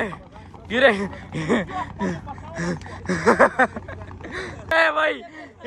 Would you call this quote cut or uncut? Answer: cut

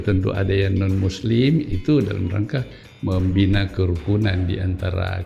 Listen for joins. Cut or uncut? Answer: uncut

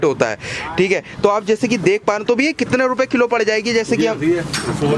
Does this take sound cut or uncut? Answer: uncut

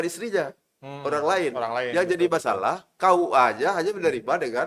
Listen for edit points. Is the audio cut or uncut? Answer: uncut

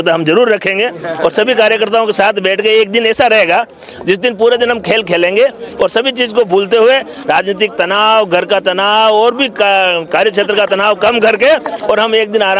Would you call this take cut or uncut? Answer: uncut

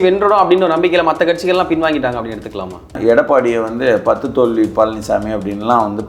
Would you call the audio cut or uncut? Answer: cut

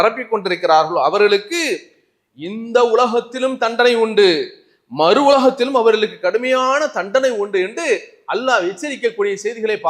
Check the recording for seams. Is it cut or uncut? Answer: uncut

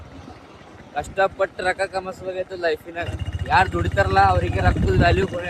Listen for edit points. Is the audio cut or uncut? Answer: uncut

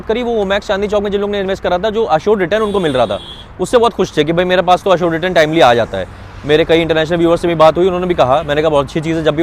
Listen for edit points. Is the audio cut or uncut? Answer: uncut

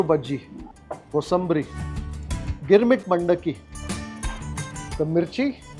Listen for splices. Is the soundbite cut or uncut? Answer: cut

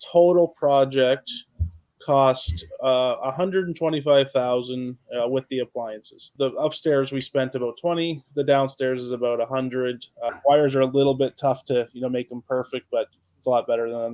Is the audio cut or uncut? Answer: cut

